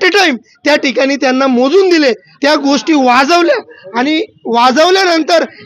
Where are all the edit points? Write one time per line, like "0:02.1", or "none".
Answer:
none